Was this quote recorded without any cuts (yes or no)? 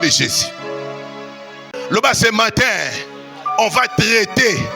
no